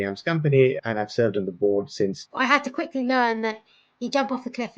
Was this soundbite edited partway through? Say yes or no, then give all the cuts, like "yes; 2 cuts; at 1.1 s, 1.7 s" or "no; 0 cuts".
yes; 2 cuts; at 0.8 s, 2.2 s